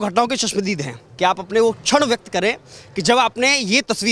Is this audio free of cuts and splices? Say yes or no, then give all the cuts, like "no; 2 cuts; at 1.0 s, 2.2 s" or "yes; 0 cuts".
no; 1 cut; at 1.0 s